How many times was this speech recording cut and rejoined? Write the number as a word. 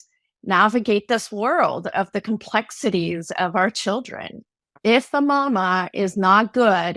one